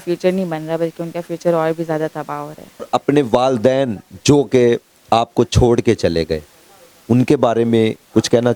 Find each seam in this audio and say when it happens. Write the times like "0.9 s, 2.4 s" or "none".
2.9 s